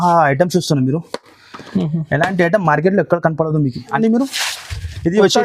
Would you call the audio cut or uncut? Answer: cut